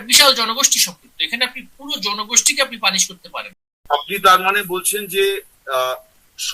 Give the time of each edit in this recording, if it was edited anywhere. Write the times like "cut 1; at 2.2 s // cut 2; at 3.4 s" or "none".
cut 1; at 3.8 s

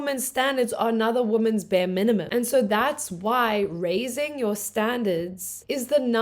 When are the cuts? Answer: cut 1; at 2.3 s

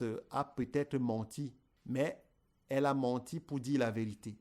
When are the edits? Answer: cut 1; at 1.7 s

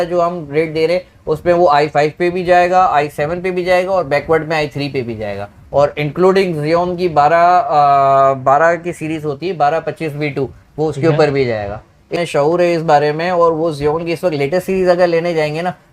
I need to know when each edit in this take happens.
cut 1; at 12.1 s

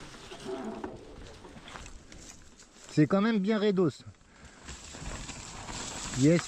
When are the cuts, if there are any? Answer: cut 1; at 1.8 s

